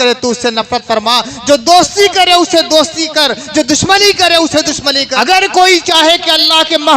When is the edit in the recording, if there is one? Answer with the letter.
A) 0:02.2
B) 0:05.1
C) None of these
B